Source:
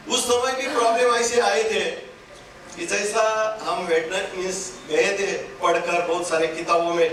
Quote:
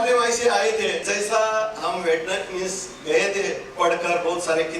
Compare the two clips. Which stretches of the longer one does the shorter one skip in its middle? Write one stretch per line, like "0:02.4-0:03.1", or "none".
0:02.0-0:02.9